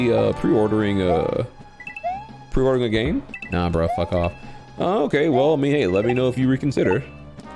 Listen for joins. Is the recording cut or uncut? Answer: uncut